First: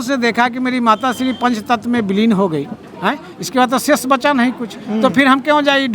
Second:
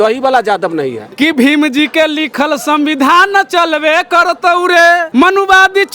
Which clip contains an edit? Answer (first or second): second